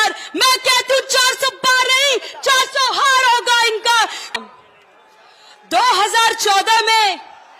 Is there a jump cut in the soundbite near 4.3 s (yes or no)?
yes